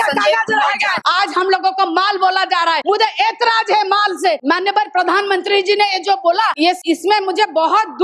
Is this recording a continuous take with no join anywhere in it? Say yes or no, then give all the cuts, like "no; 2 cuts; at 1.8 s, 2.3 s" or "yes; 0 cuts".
no; 4 cuts; at 1.0 s, 2.8 s, 4.4 s, 6.7 s